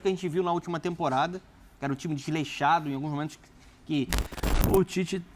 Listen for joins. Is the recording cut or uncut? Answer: cut